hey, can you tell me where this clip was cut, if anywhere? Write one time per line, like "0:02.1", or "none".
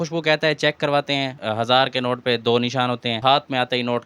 0:01.3
0:03.2